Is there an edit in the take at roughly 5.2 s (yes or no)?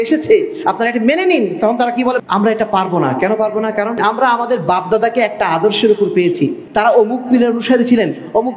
no